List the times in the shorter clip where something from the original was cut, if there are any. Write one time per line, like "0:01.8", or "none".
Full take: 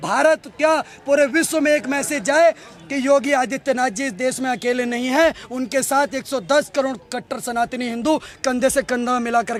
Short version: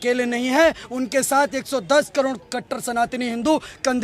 none